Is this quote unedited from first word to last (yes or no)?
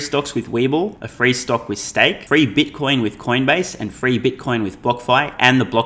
no